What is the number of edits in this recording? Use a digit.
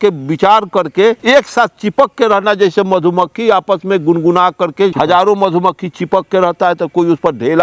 2